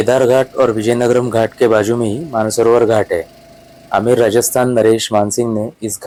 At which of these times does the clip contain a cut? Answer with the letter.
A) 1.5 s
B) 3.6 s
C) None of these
C